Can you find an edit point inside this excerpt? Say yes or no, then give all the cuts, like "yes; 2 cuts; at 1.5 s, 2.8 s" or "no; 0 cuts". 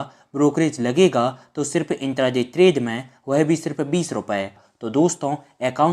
yes; 1 cut; at 4.6 s